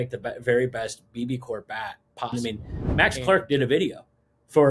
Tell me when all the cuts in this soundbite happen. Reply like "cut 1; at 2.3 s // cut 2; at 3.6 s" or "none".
cut 1; at 2.3 s